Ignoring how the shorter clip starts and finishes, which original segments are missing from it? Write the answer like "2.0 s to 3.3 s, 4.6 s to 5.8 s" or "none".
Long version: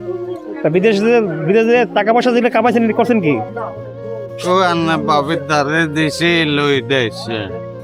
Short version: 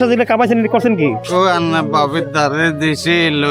3.5 s to 4.4 s